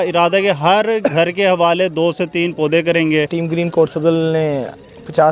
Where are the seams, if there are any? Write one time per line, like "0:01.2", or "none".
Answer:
0:03.4